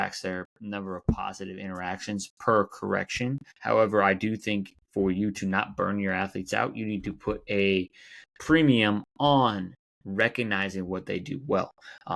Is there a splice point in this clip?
yes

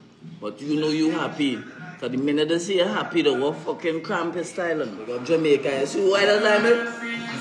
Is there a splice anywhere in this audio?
yes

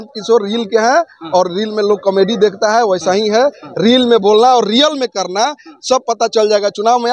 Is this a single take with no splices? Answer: yes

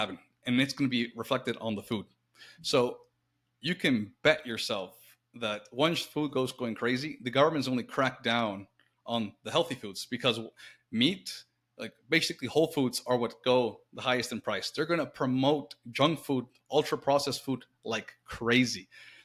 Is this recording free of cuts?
yes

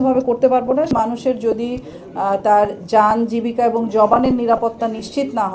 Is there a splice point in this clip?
yes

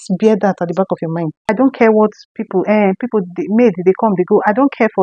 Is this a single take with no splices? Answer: no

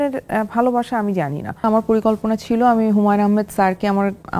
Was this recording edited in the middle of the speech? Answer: yes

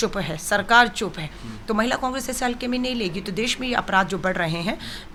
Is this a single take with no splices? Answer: yes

